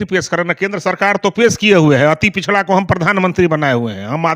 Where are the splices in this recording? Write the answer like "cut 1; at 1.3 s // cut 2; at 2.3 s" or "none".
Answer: none